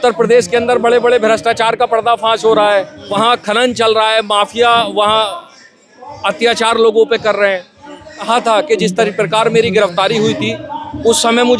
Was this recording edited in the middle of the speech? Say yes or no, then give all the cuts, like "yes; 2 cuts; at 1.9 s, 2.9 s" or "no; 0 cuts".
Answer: yes; 2 cuts; at 3.0 s, 8.3 s